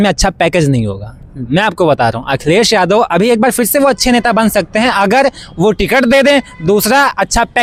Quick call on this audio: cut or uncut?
uncut